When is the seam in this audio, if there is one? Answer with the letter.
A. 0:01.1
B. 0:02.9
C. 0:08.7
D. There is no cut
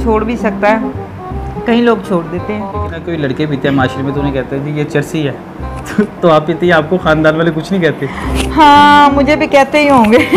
B